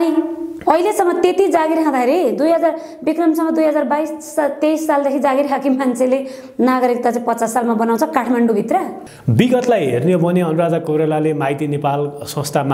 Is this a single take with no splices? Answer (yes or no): no